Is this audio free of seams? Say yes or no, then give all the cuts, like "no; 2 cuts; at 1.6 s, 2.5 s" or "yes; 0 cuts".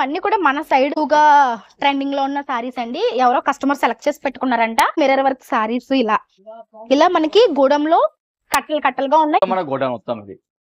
no; 3 cuts; at 0.9 s, 4.9 s, 9.4 s